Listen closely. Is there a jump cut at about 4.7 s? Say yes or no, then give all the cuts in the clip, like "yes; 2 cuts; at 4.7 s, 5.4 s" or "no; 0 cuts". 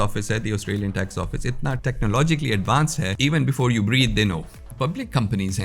yes; 3 cuts; at 1.8 s, 3.1 s, 4.7 s